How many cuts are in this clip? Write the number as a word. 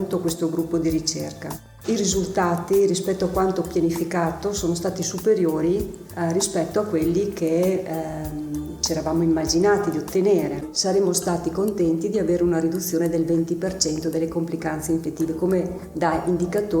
one